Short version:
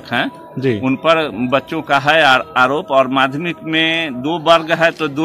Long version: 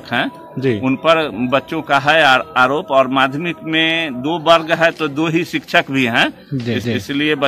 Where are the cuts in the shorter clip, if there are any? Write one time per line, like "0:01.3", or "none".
none